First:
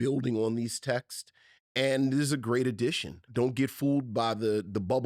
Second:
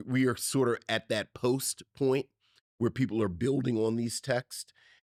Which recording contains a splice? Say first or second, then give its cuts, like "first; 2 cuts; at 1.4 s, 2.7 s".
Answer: first; 1 cut; at 3.3 s